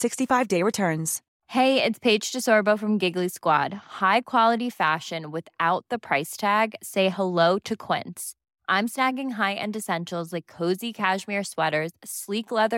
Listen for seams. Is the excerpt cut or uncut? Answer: cut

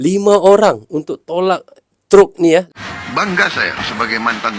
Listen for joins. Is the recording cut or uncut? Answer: cut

